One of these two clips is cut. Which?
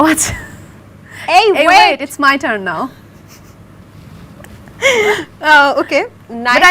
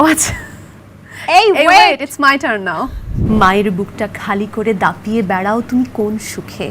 second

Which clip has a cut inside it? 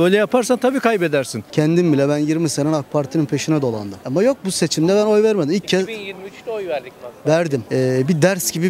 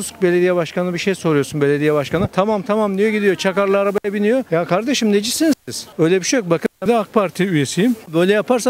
first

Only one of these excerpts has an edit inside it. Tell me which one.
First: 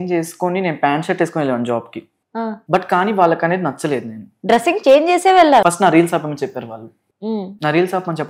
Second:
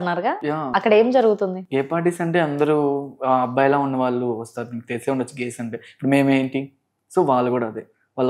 first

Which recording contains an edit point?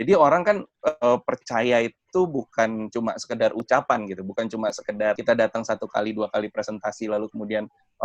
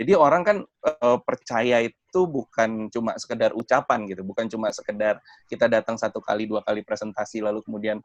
first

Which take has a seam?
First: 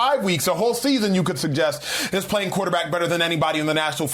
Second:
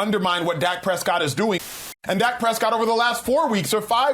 second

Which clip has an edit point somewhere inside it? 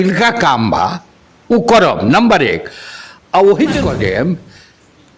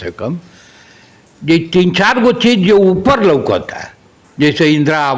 first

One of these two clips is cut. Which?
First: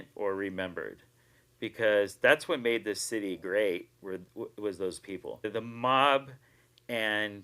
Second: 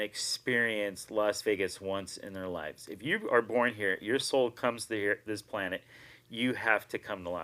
first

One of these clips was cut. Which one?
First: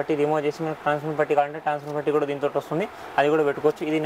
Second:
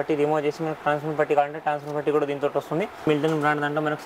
second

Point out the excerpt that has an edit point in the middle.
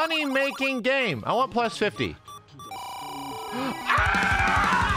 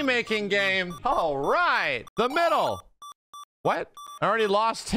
second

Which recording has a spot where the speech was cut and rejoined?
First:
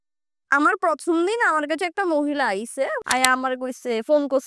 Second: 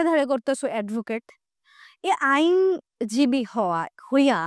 first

